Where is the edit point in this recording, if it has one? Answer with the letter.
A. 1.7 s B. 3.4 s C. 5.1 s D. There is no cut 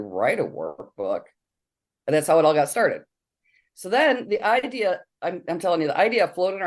D